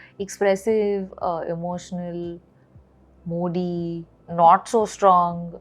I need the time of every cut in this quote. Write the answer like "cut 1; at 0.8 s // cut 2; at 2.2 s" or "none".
none